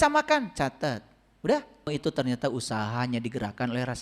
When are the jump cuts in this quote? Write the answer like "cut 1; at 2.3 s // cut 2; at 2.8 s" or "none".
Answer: cut 1; at 1.9 s